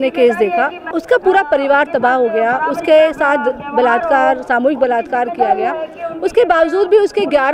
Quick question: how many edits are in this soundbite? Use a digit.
1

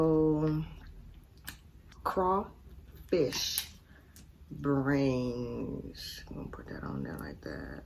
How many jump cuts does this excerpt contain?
1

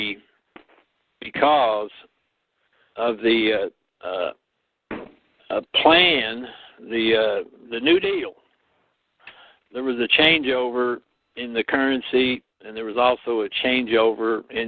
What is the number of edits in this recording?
0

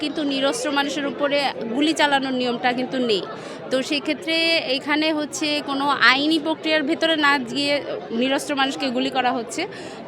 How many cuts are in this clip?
0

